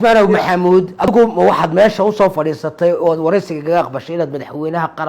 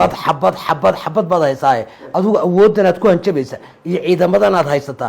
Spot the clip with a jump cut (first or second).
first